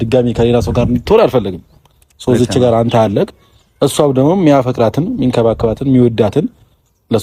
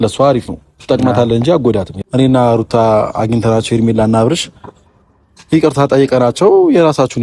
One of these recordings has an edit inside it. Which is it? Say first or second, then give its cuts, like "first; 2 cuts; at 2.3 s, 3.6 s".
second; 1 cut; at 2.0 s